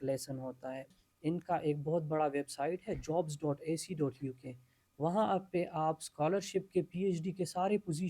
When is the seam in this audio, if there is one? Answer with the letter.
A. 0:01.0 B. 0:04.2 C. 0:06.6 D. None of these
A